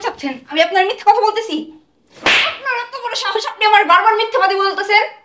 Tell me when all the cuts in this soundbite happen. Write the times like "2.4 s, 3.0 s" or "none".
none

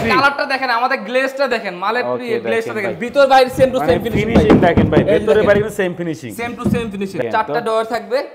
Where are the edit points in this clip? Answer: 7.2 s

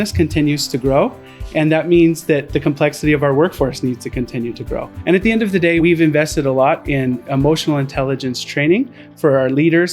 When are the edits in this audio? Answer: 4.9 s, 5.8 s

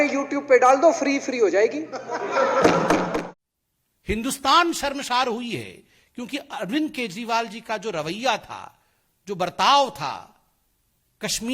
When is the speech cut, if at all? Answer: 3.1 s

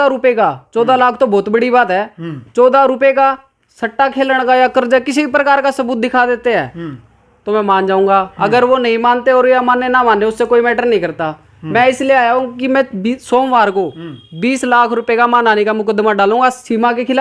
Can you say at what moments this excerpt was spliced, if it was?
none

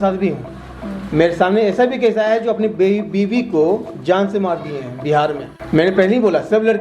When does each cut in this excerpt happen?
5.5 s

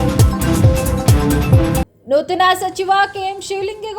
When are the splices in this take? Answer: 1.8 s

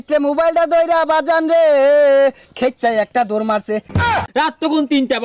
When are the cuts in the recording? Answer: 4.1 s

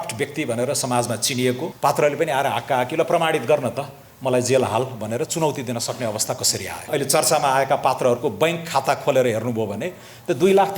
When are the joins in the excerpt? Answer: 1.7 s, 6.9 s

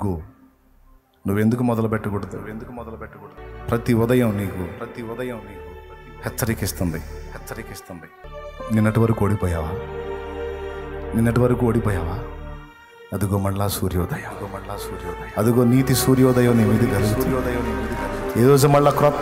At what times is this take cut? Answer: 3.4 s, 8.3 s

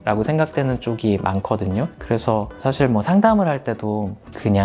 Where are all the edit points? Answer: none

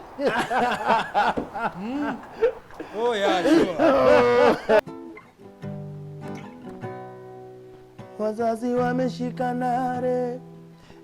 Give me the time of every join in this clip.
4.8 s

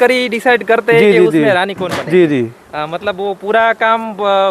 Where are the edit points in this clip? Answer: none

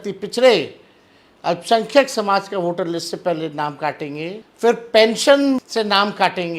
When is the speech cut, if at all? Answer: 4.4 s, 5.7 s

